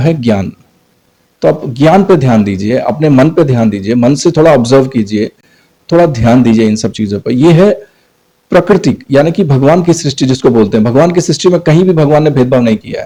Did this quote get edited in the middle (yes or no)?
no